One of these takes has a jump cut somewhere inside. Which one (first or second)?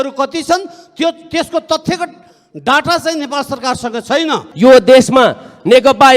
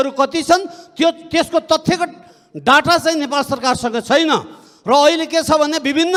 first